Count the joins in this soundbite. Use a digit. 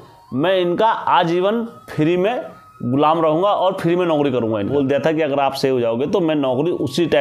1